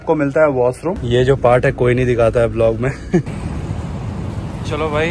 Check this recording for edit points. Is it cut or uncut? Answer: cut